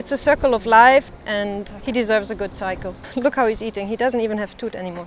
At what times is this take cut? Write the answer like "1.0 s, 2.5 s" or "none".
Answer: 1.5 s, 3.0 s